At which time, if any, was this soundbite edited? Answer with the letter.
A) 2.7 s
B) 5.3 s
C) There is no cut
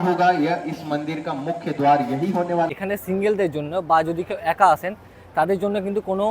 A